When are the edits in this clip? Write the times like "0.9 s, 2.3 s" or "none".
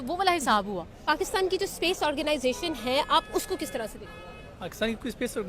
1.0 s